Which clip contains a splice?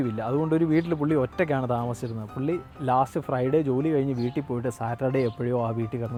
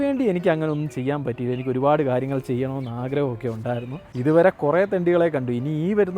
second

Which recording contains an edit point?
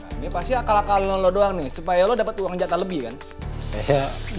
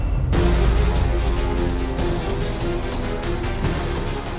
first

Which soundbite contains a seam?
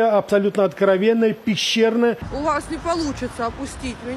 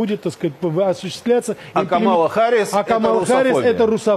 first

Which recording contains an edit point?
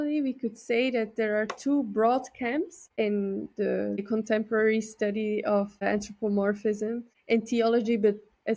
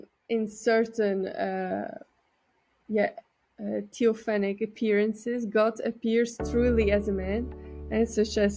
first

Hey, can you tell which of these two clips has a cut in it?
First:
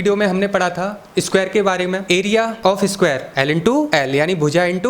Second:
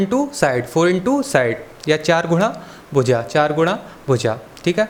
first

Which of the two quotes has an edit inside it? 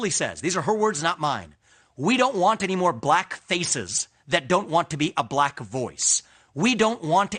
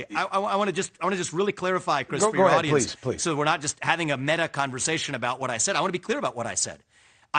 second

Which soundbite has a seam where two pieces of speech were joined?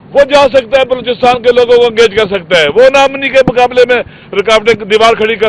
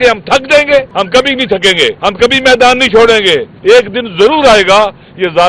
second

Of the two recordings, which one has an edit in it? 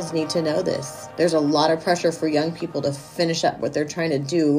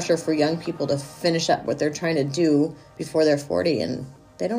first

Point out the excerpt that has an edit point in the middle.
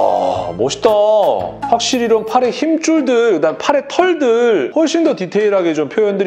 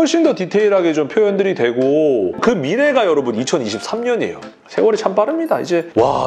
second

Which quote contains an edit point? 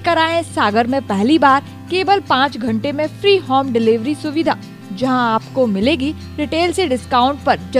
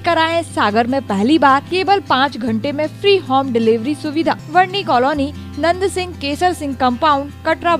second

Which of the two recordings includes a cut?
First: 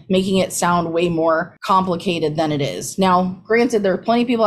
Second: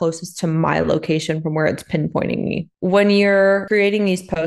second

